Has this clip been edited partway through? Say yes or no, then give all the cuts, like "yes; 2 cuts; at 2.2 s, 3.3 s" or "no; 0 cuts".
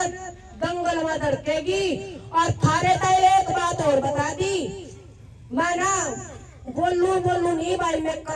no; 0 cuts